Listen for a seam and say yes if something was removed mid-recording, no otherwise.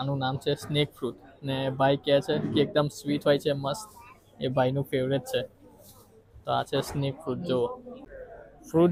no